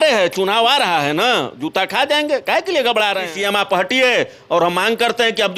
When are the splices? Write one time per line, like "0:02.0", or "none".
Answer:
0:03.3